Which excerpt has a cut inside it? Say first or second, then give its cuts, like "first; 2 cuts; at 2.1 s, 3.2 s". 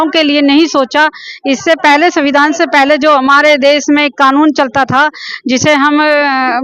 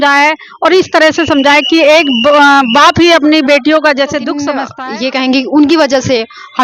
second; 1 cut; at 4.7 s